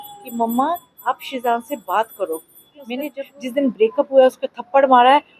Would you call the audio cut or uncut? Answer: cut